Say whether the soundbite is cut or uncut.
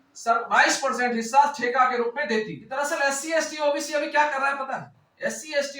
cut